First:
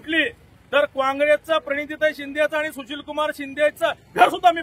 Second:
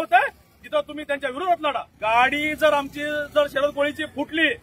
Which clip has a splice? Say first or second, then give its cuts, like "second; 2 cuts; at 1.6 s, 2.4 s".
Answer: second; 1 cut; at 1.9 s